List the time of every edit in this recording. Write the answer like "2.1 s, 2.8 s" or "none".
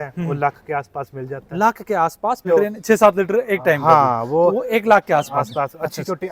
none